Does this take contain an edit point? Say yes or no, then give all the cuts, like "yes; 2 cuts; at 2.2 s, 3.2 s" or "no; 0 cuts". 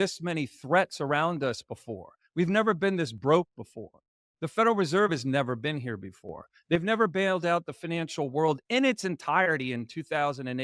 no; 0 cuts